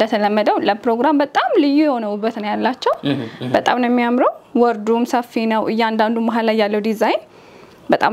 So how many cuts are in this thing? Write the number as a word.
zero